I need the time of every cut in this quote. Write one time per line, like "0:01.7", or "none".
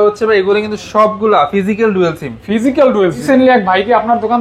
0:03.2